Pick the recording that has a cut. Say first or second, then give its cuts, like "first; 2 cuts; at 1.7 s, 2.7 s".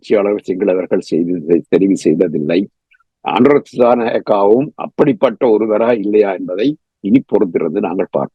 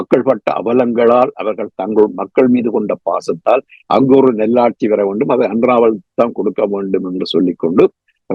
first; 1 cut; at 3.0 s